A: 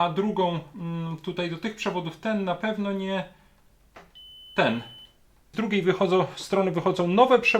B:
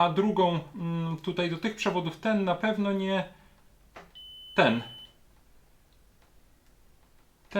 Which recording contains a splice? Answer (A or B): A